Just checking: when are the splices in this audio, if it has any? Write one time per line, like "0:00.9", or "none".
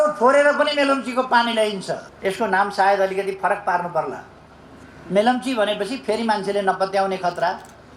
0:02.1